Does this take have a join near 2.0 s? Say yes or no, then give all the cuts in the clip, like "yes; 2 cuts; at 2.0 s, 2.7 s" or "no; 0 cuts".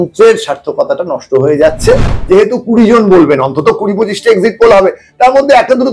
yes; 1 cut; at 2.0 s